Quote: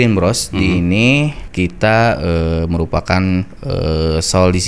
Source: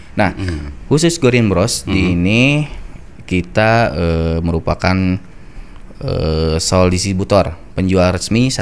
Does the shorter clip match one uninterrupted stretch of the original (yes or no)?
no